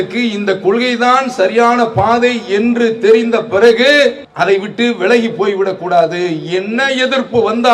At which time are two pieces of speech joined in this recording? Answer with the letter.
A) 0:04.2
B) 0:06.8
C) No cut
A